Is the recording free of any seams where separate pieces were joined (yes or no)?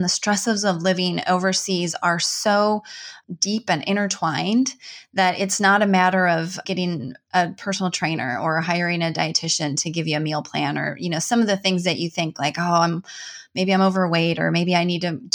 no